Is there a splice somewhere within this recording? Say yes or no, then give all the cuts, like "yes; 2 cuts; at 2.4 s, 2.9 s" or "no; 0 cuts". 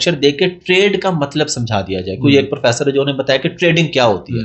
no; 0 cuts